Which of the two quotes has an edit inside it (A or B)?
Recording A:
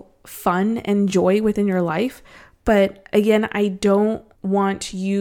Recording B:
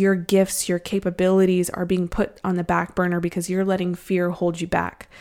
A